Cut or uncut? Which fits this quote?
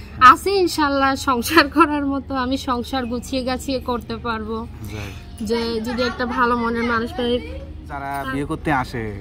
uncut